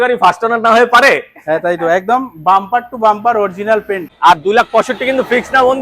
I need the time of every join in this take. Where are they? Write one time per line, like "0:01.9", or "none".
0:04.0